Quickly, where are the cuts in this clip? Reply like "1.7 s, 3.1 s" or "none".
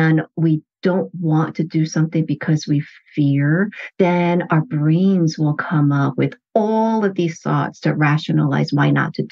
none